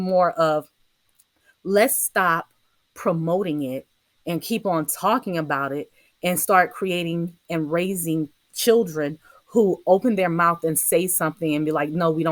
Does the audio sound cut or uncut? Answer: uncut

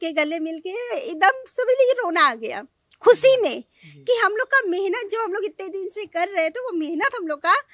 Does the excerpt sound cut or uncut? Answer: uncut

